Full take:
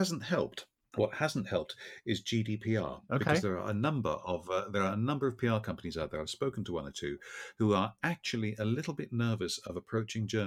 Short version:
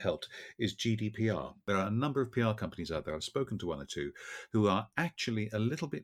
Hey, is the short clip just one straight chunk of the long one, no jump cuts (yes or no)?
no